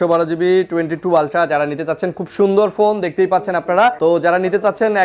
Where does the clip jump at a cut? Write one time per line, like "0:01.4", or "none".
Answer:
0:04.0